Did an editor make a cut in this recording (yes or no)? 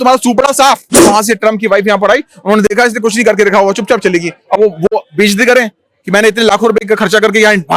yes